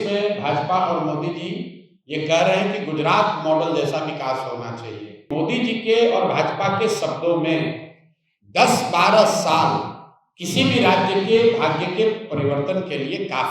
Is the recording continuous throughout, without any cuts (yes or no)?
no